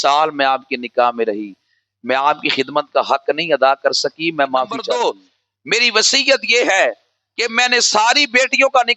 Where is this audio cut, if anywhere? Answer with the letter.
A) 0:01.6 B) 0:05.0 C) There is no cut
B